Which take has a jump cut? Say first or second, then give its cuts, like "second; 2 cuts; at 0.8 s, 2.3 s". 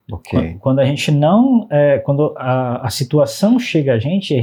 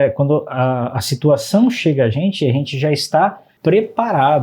second; 1 cut; at 3.5 s